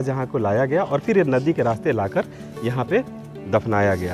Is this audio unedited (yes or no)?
yes